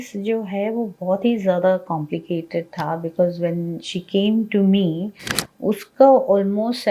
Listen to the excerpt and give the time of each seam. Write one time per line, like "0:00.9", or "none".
none